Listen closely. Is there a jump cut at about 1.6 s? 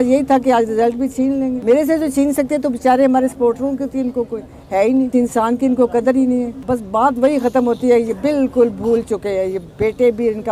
no; 0 cuts

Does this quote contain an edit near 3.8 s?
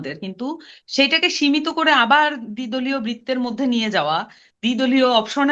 no; 0 cuts

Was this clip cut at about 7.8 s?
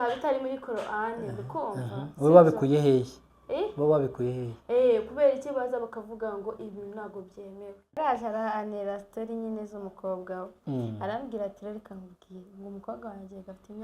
yes; 1 cut; at 7.8 s

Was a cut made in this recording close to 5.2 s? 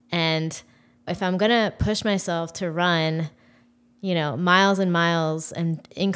no; 1 cut; at 1.1 s

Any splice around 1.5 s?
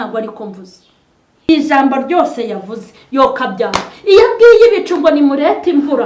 yes; 1 cut; at 1.5 s

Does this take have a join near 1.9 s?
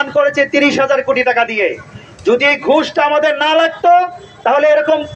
no; 0 cuts

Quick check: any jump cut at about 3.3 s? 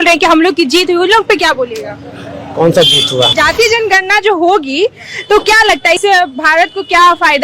yes; 1 cut; at 3.3 s

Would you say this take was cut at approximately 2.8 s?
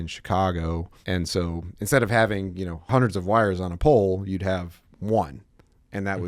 yes; 2 cuts; at 0.9 s, 2.8 s

